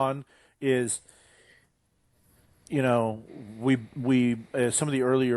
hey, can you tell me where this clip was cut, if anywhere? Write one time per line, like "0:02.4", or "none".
none